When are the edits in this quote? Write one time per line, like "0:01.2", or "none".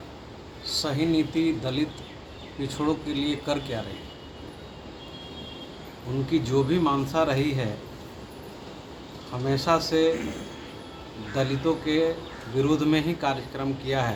none